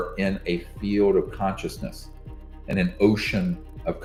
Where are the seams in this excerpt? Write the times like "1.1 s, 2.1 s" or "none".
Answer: none